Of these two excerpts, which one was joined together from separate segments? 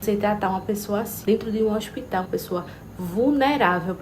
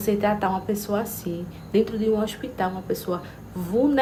first; 2 cuts; at 1.1 s, 2.3 s

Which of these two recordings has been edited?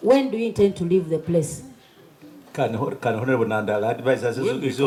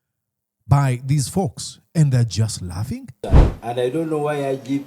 second; 1 cut; at 3.2 s

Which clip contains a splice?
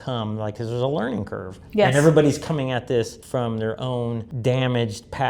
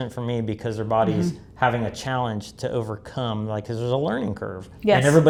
first; 2 cuts; at 3.2 s, 4.3 s

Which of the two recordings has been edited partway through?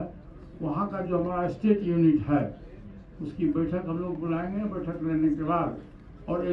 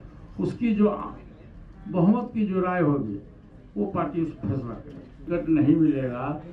second; 1 cut; at 5.3 s

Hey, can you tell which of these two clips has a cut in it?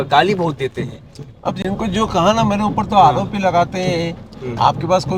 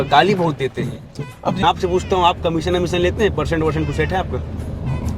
second; 1 cut; at 1.6 s

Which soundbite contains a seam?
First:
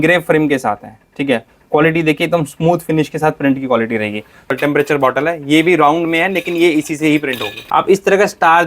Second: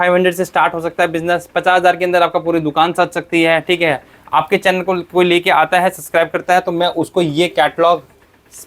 first; 2 cuts; at 4.5 s, 7.5 s

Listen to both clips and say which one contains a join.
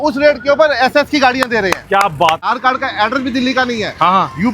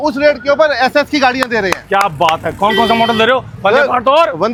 first; 1 cut; at 2.5 s

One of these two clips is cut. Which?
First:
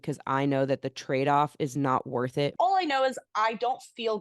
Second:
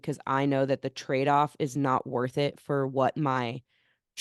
first; 1 cut; at 2.5 s

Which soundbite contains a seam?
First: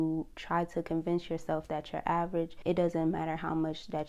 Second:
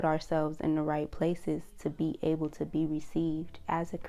first; 1 cut; at 2.5 s

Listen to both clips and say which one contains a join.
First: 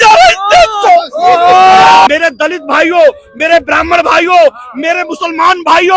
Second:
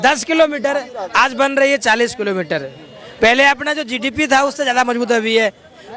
first; 1 cut; at 2.1 s

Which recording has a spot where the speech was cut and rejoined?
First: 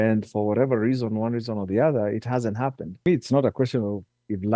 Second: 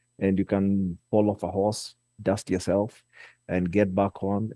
first; 1 cut; at 3.0 s

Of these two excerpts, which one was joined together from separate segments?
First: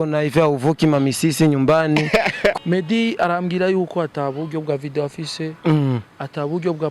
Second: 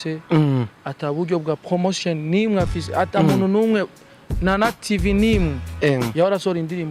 first; 1 cut; at 2.6 s

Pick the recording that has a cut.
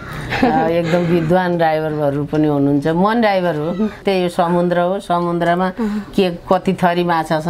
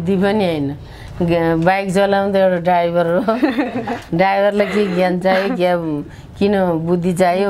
first; 1 cut; at 4.0 s

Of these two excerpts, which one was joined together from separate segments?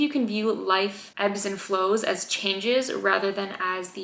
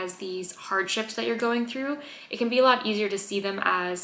first; 1 cut; at 1.0 s

